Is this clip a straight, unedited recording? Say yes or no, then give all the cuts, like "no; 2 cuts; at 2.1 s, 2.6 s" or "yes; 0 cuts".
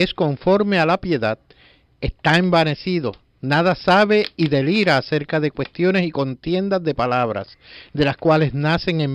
no; 1 cut; at 3.4 s